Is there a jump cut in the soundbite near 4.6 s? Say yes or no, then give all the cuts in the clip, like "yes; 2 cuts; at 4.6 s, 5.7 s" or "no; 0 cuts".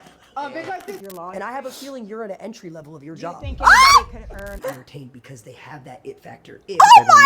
yes; 2 cuts; at 1.0 s, 4.6 s